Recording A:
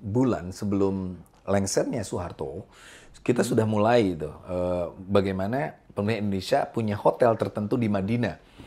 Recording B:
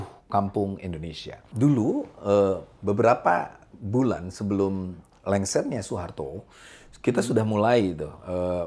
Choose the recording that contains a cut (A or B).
B